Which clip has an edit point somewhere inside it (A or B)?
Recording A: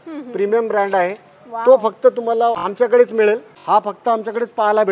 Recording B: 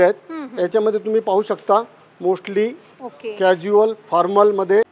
A